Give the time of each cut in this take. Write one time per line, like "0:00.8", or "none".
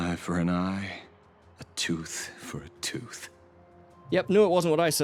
0:03.9